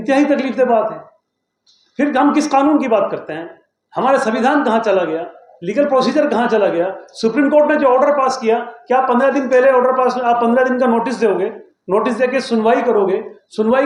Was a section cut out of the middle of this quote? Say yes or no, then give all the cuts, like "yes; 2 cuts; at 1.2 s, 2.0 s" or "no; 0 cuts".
no; 0 cuts